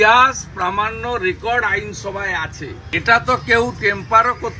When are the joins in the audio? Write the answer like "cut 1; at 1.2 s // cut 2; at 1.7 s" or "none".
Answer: cut 1; at 2.8 s